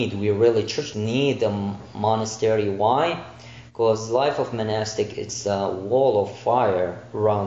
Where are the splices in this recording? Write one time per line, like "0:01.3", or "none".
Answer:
0:00.9